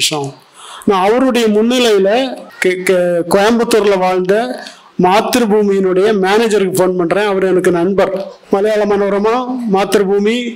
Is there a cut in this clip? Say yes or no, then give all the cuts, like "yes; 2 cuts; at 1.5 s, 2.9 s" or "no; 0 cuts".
yes; 2 cuts; at 2.4 s, 8.3 s